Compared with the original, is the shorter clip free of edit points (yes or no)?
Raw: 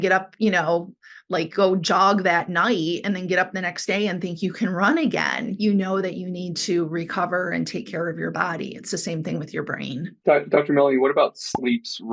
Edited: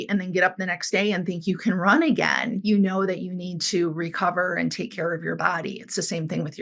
yes